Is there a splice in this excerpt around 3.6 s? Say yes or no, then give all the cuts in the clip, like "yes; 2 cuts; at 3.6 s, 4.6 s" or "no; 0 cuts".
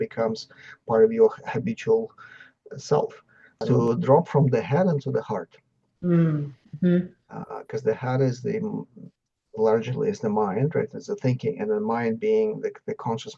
yes; 1 cut; at 3.6 s